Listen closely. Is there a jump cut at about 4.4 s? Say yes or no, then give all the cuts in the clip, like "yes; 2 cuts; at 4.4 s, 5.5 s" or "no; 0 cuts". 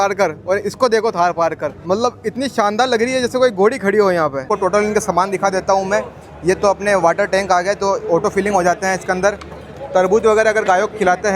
yes; 2 cuts; at 1.7 s, 4.4 s